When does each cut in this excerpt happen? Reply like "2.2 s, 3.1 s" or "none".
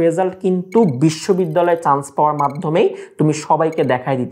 none